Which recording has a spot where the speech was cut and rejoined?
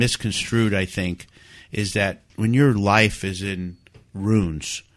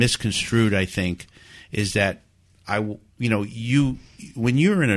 first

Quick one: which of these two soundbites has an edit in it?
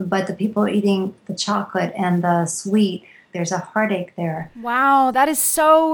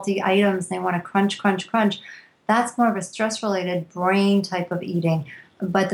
first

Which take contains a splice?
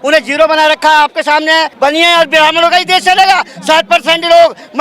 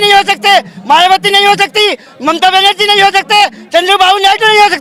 first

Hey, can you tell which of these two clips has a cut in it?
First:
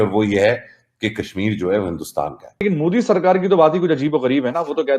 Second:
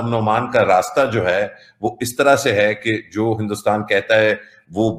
first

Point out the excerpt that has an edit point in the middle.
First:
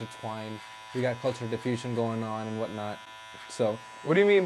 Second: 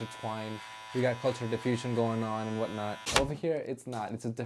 second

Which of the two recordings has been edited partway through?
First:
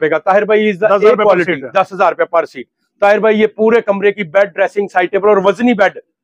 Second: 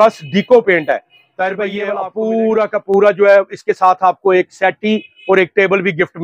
second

